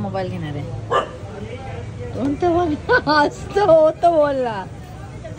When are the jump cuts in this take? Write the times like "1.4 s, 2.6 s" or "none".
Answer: none